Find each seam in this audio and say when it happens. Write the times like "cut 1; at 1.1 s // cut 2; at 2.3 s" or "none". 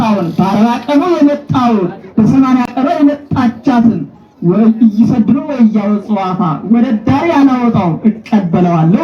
none